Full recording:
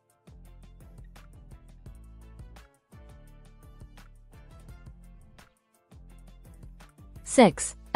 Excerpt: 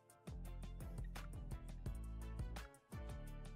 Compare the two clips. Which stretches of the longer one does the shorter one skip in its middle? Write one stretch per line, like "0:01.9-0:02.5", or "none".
none